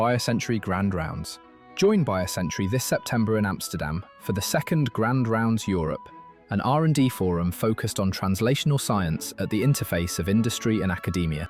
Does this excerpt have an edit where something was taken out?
no; 0 cuts

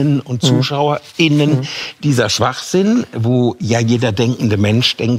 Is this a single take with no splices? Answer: yes; 0 cuts

